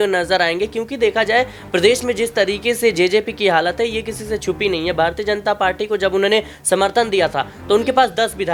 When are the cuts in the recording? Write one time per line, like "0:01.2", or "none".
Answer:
none